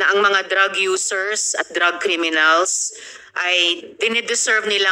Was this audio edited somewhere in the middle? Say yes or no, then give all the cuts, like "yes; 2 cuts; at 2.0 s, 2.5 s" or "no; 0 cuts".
no; 0 cuts